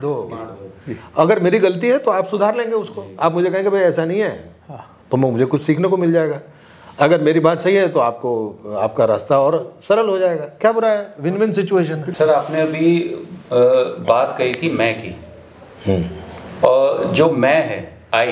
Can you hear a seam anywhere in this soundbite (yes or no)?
yes